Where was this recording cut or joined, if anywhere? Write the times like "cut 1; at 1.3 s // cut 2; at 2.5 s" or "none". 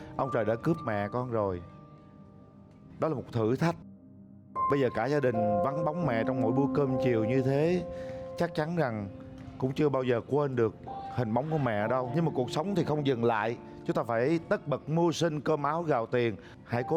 none